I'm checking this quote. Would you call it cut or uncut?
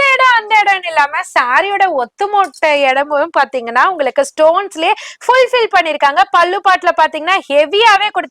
uncut